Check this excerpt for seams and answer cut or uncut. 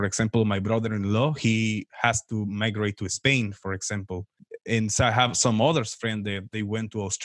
cut